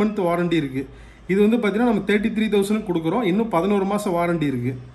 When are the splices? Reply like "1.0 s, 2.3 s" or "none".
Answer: none